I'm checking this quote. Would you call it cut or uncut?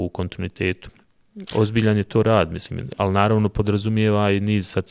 uncut